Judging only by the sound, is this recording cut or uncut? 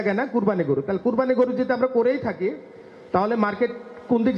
uncut